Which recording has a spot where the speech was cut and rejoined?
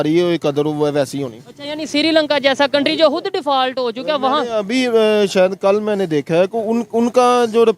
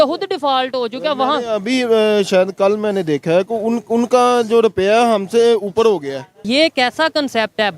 second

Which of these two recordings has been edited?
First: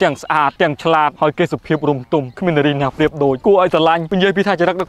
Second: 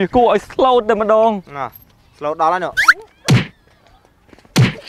first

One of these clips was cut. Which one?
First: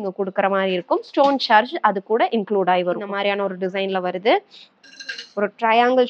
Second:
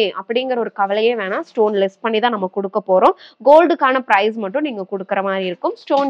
first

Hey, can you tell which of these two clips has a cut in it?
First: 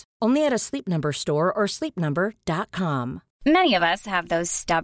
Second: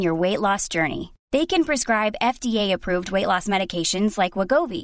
first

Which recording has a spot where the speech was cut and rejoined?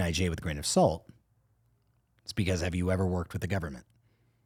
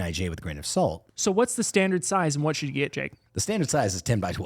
second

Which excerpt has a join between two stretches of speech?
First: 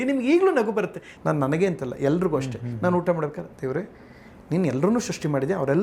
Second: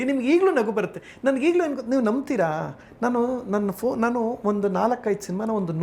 first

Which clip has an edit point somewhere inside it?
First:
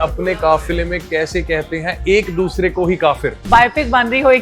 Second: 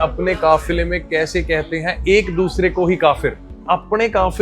first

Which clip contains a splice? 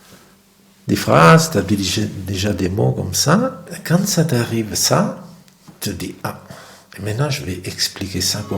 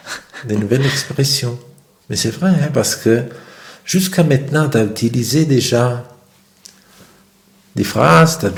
first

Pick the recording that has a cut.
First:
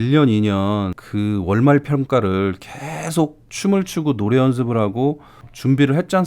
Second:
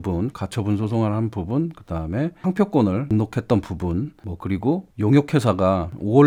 first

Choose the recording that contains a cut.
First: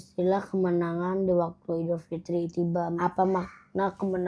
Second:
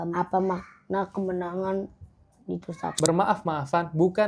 second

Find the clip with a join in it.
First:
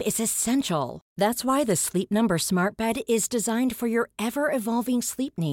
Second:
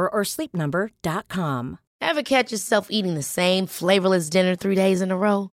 second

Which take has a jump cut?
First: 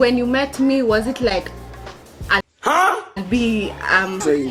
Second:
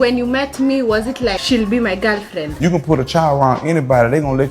second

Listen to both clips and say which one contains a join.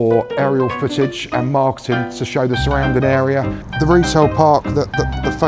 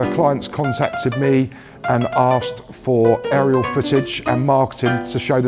first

